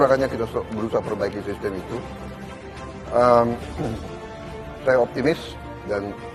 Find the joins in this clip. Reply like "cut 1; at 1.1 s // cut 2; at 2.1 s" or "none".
none